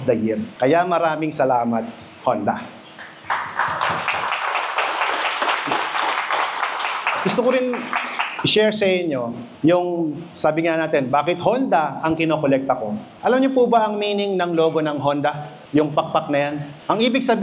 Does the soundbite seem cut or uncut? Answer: uncut